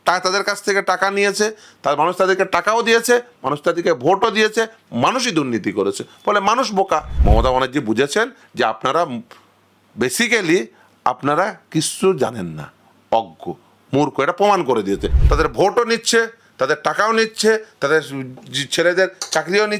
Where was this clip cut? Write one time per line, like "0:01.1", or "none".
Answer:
0:07.1
0:15.1